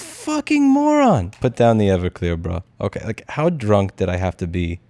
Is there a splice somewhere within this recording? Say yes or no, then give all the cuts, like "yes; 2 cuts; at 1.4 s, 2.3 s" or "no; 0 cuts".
yes; 1 cut; at 1.4 s